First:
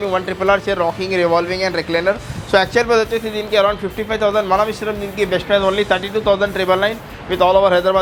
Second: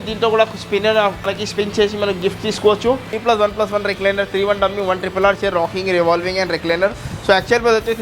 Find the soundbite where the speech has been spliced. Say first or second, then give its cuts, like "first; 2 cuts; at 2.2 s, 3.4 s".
second; 2 cuts; at 1.4 s, 3.1 s